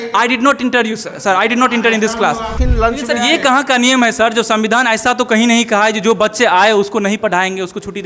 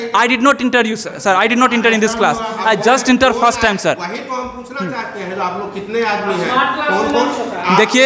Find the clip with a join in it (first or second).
first